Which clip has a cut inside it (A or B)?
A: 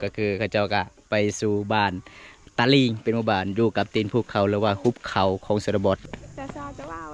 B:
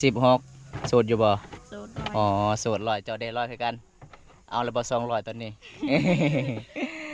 A